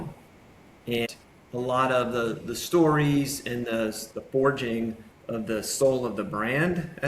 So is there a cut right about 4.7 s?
no; 1 cut; at 1.1 s

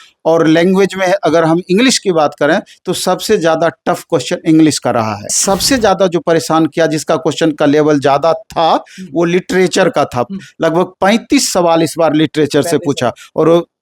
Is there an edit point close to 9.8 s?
no; 1 cut; at 5.4 s

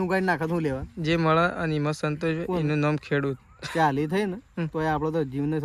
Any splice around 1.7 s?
no; 0 cuts

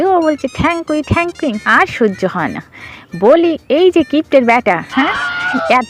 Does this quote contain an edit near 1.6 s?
yes; 1 cut; at 1.6 s

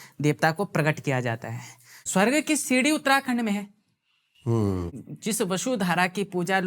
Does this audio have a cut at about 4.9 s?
yes; 2 cuts; at 2.0 s, 4.9 s

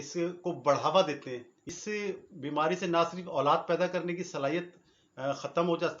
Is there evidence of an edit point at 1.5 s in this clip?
yes; 1 cut; at 1.5 s

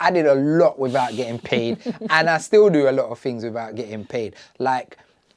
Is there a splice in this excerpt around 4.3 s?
no; 0 cuts

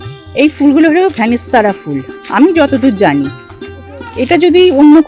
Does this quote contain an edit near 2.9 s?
no; 0 cuts

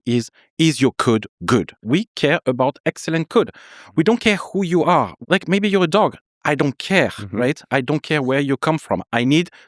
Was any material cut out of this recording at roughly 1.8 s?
yes; 2 cuts; at 1.8 s, 5.2 s

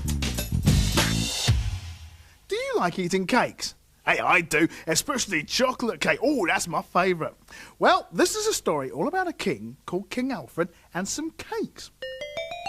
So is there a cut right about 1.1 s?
no; 0 cuts

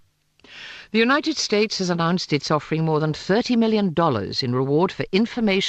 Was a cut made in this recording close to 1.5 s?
no; 1 cut; at 3.3 s

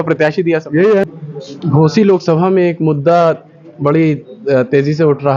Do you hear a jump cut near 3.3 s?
no; 1 cut; at 1.0 s

